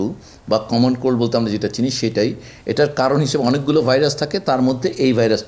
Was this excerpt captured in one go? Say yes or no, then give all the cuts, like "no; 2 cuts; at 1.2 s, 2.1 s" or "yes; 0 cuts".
yes; 0 cuts